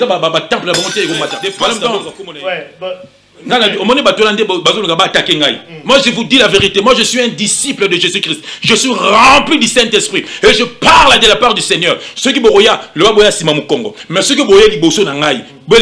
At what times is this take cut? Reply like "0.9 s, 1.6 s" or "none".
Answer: 1.8 s